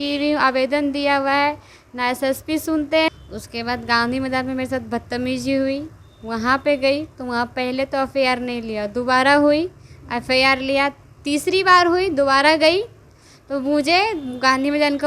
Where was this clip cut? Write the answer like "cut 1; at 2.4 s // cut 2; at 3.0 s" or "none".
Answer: cut 1; at 3.1 s